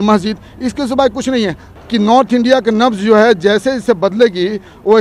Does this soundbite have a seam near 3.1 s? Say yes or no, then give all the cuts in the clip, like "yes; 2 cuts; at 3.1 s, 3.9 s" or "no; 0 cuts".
no; 1 cut; at 1.7 s